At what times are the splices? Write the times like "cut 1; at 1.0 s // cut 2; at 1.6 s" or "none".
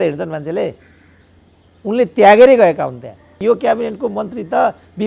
cut 1; at 3.4 s